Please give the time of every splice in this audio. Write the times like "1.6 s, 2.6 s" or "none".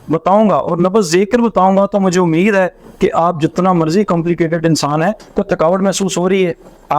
5.2 s